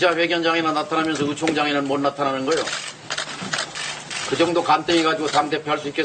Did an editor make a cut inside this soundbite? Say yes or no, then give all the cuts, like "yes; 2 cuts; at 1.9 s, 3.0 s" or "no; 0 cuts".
no; 0 cuts